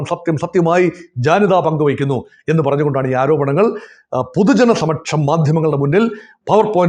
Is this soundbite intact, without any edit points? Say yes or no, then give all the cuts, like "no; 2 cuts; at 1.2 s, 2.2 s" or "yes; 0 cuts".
yes; 0 cuts